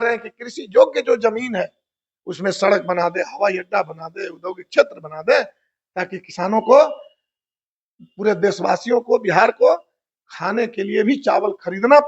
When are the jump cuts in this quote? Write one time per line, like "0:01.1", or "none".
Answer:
none